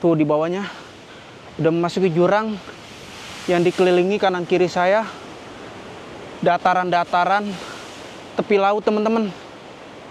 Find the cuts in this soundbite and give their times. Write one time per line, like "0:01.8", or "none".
none